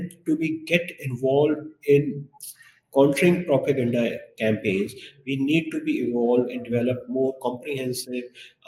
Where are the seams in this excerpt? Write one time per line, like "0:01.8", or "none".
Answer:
none